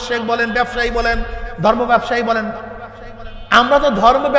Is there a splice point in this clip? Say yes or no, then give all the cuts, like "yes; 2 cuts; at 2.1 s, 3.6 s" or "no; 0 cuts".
no; 0 cuts